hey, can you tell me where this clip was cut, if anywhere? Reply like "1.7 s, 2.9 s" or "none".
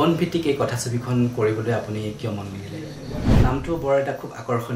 3.3 s

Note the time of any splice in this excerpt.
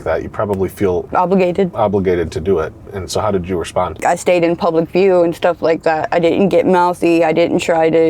1.1 s, 4.0 s

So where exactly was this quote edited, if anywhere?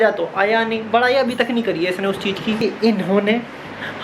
2.6 s

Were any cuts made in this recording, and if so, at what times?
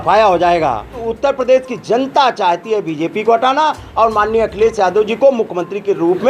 1.0 s

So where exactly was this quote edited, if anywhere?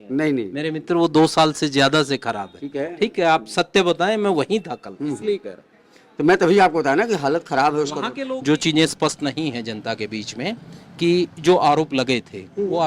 8.1 s

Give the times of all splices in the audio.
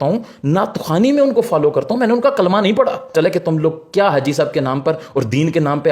3.1 s

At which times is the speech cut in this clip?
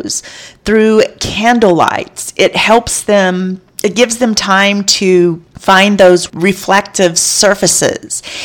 5.5 s, 6.3 s

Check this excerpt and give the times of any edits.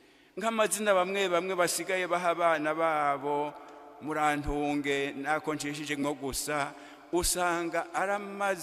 1.0 s

